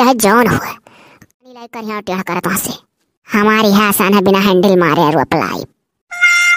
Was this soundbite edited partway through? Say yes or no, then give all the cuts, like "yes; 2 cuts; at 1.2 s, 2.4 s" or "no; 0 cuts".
yes; 1 cut; at 1.3 s